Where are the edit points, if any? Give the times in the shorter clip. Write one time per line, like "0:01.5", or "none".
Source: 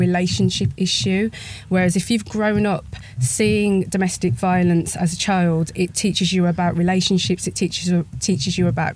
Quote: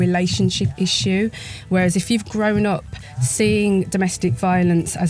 none